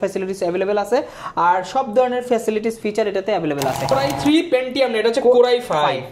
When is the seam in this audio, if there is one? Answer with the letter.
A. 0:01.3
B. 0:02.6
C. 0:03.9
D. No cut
C